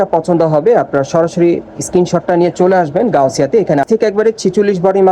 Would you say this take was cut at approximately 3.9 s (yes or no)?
yes